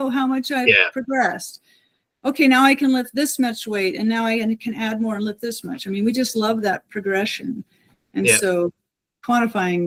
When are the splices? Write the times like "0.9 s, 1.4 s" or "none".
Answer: none